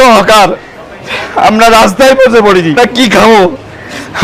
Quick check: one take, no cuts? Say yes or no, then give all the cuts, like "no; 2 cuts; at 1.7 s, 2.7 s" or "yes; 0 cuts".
no; 1 cut; at 2.8 s